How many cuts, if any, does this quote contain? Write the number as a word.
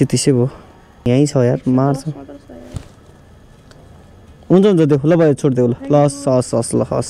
one